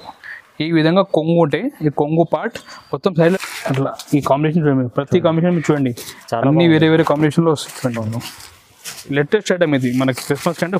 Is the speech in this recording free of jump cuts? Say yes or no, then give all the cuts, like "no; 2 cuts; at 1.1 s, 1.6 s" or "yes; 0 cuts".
no; 2 cuts; at 3.4 s, 9.1 s